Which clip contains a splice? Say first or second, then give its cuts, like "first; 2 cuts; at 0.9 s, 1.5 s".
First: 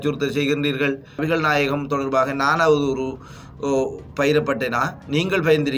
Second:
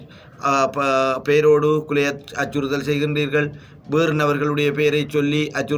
first; 1 cut; at 1.2 s